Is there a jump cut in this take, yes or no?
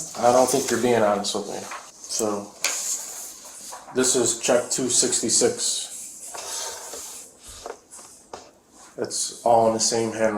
yes